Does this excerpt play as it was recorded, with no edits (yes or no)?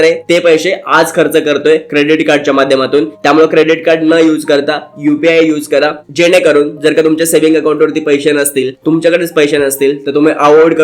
yes